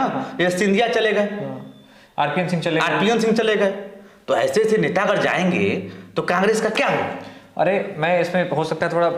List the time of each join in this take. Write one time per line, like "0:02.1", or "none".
none